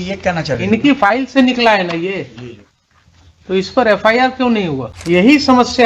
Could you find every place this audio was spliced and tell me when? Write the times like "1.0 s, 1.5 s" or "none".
4.9 s